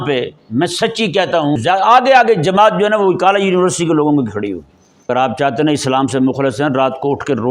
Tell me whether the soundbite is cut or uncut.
cut